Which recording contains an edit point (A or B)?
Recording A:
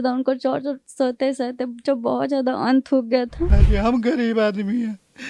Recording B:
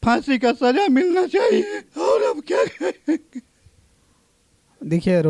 A